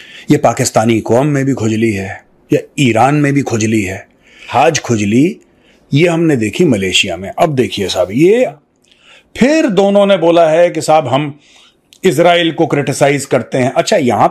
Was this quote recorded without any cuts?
no; 2 cuts; at 4.4 s, 8.5 s

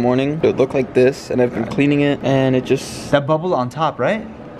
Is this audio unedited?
yes; 0 cuts

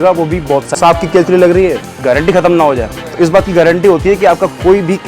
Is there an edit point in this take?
yes; 2 cuts; at 0.7 s, 2.0 s

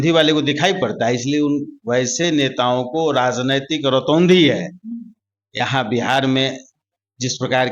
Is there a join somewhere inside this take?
no; 0 cuts

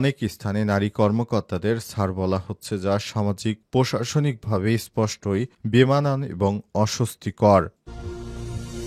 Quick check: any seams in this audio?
yes; 1 cut; at 7.8 s

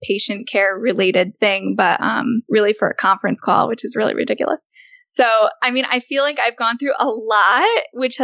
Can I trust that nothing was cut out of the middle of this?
no; 2 cuts; at 1.3 s, 2.4 s

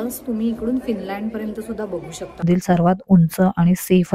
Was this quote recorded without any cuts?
no; 1 cut; at 2.5 s

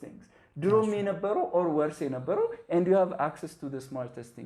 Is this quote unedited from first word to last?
yes; 0 cuts

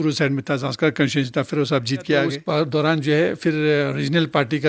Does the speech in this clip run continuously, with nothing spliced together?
no; 1 cut; at 2.4 s

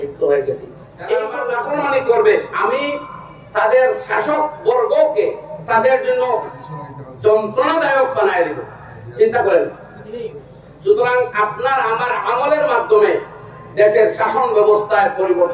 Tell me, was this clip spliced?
yes; 2 cuts; at 1.4 s, 2.5 s

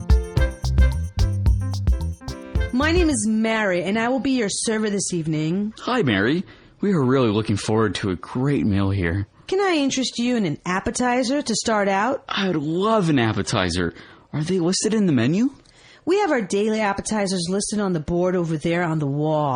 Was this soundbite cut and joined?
yes; 1 cut; at 2.7 s

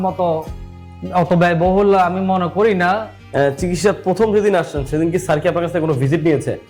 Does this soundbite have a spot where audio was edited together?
yes; 1 cut; at 3.1 s

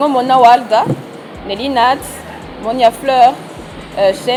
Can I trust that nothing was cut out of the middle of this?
yes; 0 cuts

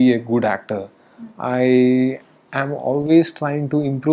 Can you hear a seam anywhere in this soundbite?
no; 0 cuts

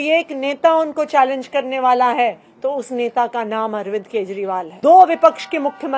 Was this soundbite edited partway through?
yes; 1 cut; at 4.7 s

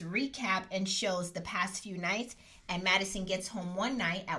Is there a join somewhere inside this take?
no; 0 cuts

